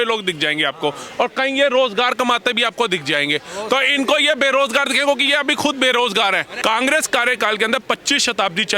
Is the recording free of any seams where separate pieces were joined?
no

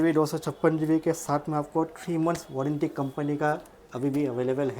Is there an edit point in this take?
no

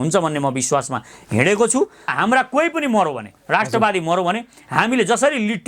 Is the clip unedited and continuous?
no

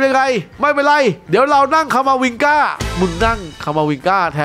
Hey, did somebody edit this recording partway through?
no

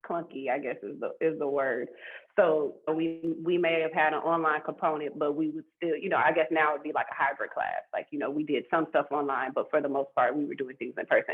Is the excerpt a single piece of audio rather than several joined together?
no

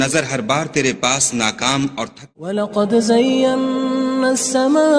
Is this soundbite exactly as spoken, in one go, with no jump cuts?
no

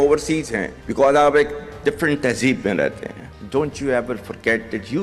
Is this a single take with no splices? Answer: yes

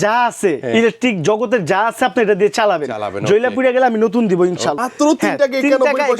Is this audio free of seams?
no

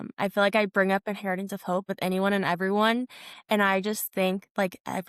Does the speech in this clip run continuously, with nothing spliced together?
no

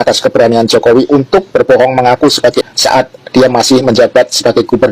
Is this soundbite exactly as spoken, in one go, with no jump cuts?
no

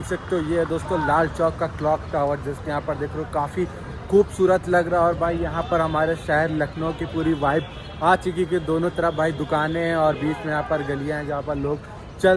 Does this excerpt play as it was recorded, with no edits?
yes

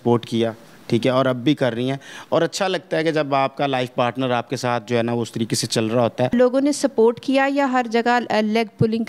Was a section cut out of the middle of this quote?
yes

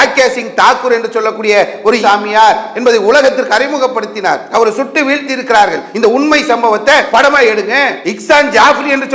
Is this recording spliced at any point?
no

